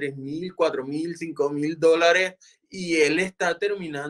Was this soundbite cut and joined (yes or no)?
no